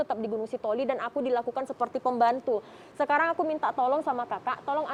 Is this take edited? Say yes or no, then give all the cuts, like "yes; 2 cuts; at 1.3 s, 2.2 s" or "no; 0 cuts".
no; 0 cuts